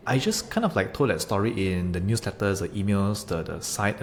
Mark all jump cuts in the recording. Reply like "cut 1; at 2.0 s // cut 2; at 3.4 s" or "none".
none